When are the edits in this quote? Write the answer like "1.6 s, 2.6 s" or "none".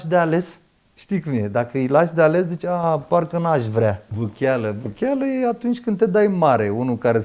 4.1 s